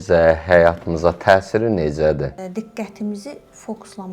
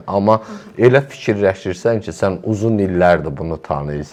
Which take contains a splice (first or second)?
first